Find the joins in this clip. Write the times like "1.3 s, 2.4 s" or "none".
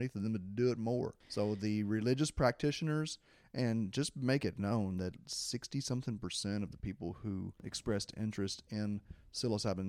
1.2 s, 7.6 s